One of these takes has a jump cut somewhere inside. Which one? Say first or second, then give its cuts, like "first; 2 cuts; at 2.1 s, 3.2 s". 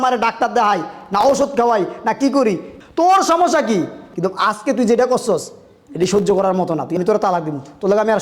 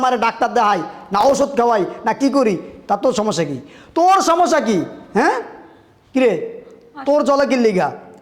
first; 3 cuts; at 2.7 s, 4.0 s, 7.0 s